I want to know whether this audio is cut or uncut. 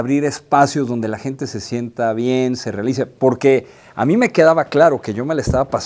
uncut